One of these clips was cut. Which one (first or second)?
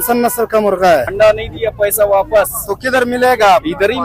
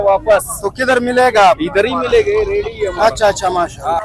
first